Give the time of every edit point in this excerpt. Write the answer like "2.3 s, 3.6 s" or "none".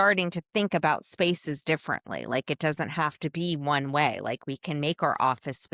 none

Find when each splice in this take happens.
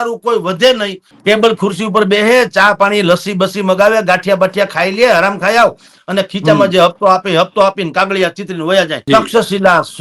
1.1 s, 9.0 s

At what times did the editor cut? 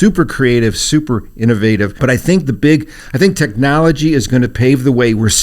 1.9 s

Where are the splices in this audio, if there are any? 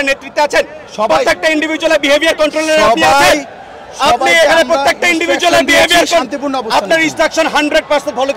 none

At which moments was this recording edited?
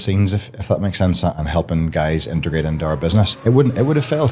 1.3 s, 3.3 s

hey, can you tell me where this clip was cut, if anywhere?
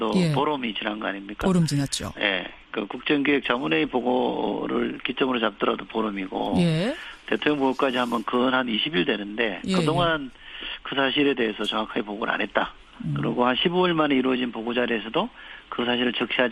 none

